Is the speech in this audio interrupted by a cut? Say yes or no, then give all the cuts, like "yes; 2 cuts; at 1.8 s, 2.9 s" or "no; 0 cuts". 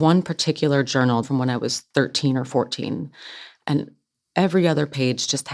yes; 1 cut; at 1.2 s